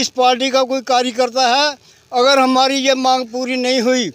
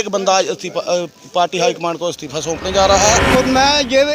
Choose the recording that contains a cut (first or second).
second